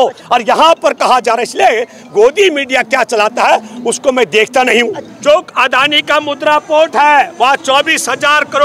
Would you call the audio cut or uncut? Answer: cut